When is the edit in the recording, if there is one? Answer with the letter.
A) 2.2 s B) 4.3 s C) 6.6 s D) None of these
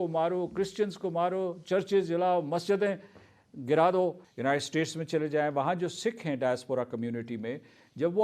B